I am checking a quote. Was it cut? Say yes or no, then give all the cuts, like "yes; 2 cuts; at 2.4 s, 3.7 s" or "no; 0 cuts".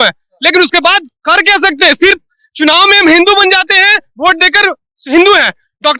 no; 0 cuts